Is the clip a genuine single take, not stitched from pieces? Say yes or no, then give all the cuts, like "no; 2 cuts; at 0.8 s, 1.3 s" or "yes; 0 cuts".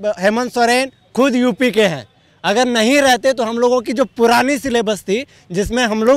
yes; 0 cuts